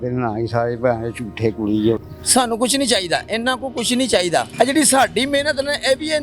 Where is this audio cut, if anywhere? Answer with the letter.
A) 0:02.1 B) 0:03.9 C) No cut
A